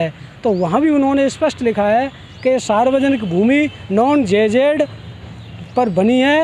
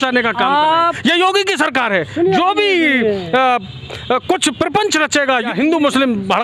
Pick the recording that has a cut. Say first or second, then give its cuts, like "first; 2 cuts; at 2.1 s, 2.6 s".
second; 1 cut; at 5.5 s